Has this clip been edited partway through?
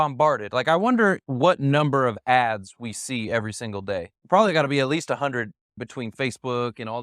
yes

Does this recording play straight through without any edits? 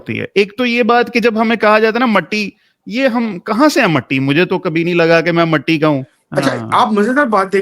no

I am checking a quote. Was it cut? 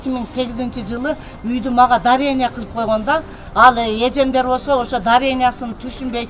no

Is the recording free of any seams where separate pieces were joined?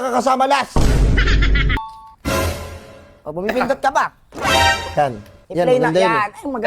no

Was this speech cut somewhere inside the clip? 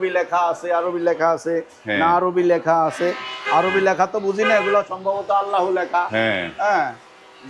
no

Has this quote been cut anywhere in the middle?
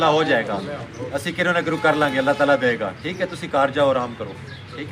no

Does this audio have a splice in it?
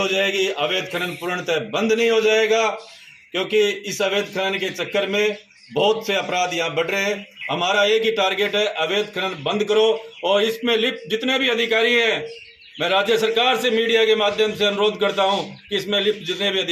no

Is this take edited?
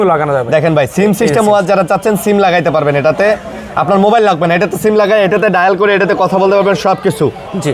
no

